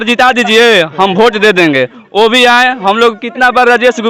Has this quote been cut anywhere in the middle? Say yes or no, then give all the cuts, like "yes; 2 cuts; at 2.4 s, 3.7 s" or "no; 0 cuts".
no; 0 cuts